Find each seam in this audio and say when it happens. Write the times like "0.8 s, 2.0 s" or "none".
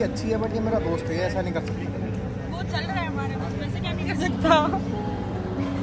none